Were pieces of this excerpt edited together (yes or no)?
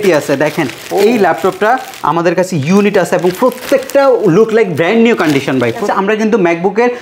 yes